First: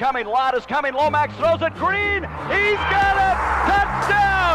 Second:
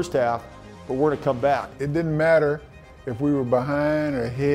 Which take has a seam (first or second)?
second